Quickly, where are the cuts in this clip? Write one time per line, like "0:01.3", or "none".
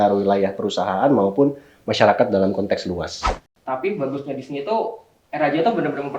0:03.2